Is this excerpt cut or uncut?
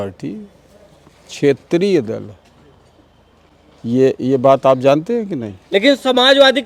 uncut